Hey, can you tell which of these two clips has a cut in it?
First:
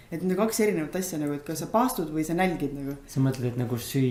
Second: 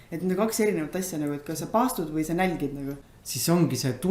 second; 1 cut; at 3.0 s

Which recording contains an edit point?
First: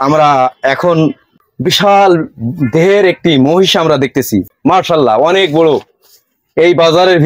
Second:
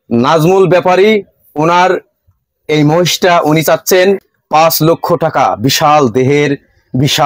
first; 1 cut; at 4.5 s

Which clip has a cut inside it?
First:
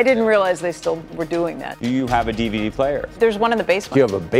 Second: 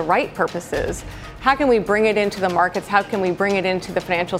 first; 1 cut; at 3.2 s

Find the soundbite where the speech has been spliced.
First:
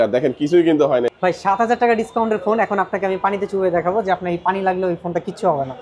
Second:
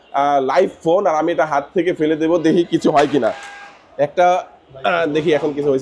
first; 1 cut; at 1.1 s

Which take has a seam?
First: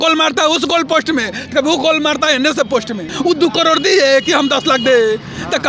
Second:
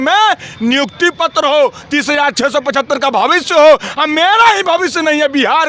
first; 1 cut; at 3.1 s

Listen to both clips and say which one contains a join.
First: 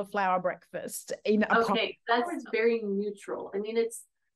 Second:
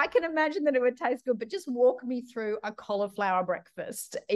first; 1 cut; at 2.4 s

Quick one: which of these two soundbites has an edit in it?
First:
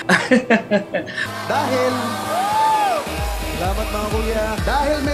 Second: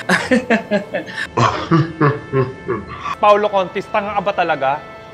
first; 1 cut; at 1.2 s

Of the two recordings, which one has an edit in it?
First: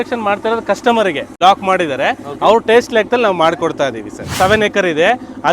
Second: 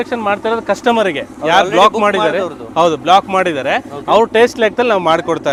first; 2 cuts; at 1.3 s, 4.2 s

